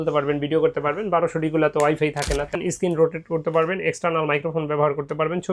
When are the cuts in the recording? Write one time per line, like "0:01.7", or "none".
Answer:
0:02.5